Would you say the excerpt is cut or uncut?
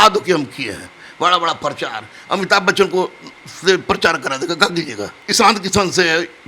cut